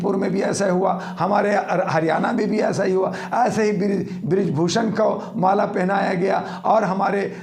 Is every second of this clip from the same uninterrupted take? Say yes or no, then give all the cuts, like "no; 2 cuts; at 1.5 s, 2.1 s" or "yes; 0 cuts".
yes; 0 cuts